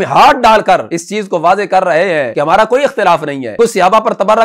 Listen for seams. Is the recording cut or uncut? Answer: cut